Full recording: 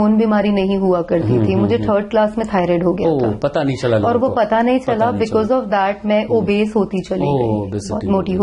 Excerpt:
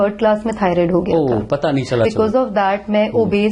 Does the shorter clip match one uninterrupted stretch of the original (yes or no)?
no